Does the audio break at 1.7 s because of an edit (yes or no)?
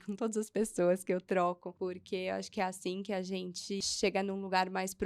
yes